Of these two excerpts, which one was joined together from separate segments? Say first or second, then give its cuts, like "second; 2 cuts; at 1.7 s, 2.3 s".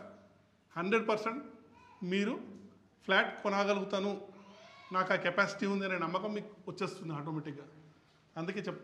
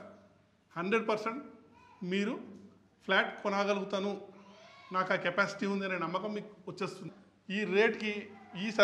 second; 1 cut; at 7.1 s